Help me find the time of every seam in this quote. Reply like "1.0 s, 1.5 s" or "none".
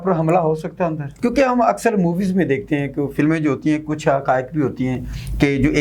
1.1 s